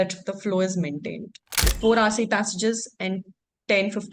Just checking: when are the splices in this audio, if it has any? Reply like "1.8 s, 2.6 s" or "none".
1.7 s